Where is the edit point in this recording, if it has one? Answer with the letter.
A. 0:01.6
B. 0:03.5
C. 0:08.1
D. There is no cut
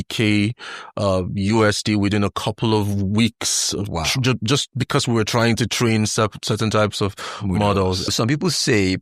C